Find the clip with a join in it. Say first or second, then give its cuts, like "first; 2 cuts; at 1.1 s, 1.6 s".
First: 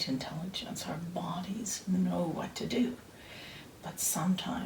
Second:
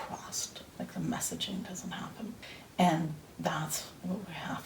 second; 1 cut; at 2.5 s